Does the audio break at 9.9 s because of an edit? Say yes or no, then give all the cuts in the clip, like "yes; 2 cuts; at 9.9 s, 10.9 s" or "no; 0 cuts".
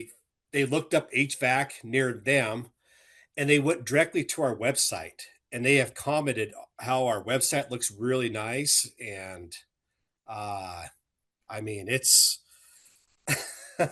no; 0 cuts